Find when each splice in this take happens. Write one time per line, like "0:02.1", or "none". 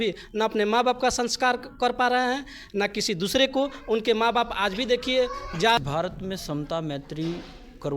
0:05.8